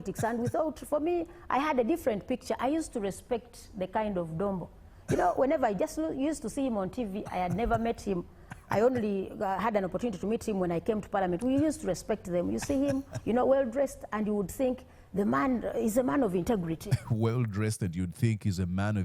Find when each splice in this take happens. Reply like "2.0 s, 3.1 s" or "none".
11.0 s